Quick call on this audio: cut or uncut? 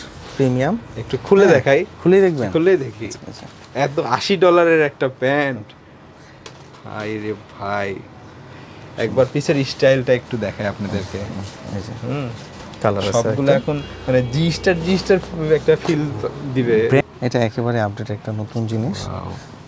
cut